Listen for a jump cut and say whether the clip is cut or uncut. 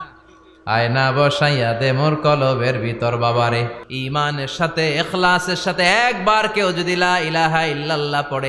cut